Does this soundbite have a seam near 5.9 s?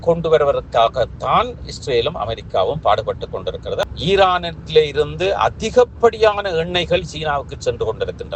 no; 1 cut; at 3.8 s

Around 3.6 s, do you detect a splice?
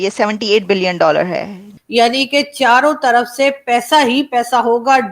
no; 1 cut; at 1.6 s

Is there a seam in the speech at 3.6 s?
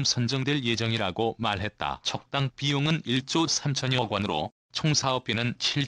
no; 2 cuts; at 2.0 s, 4.8 s

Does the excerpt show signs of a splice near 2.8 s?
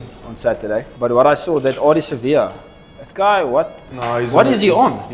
no; 1 cut; at 0.9 s

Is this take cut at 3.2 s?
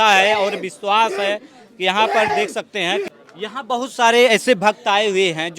yes; 1 cut; at 3.2 s

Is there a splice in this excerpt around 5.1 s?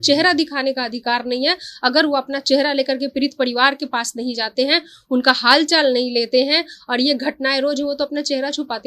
no; 0 cuts

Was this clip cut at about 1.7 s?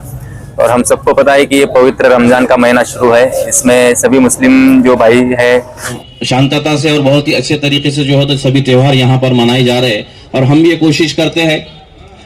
no; 1 cut; at 6.0 s

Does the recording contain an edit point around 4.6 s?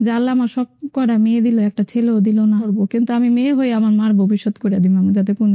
no; 1 cut; at 2.7 s

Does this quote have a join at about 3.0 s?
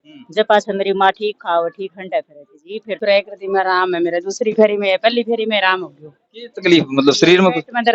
yes; 1 cut; at 3.0 s

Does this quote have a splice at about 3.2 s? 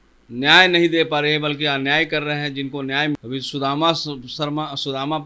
yes; 1 cut; at 3.2 s

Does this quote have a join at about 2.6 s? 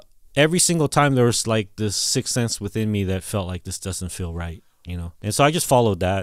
no; 1 cut; at 5.2 s

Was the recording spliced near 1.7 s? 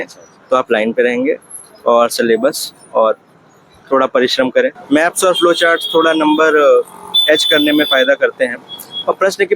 no; 1 cut; at 4.8 s

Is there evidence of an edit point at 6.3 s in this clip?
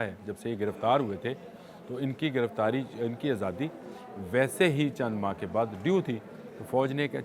no; 0 cuts

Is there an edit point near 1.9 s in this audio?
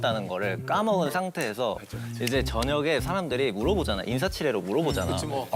no; 0 cuts

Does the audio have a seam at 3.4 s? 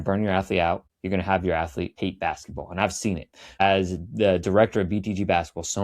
no; 2 cuts; at 0.9 s, 1.9 s

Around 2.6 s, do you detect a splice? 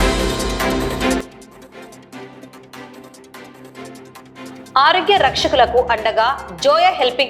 no; 2 cuts; at 1.2 s, 4.5 s

